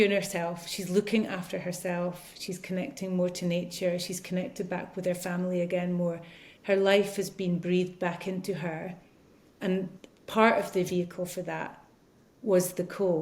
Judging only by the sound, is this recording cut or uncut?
uncut